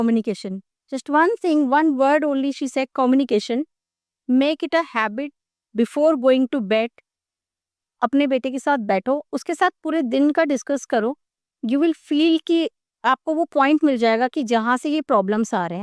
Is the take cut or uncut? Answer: uncut